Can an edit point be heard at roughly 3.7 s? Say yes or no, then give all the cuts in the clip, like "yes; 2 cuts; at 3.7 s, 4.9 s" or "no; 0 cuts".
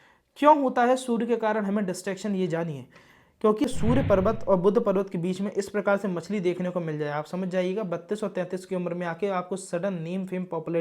yes; 1 cut; at 3.7 s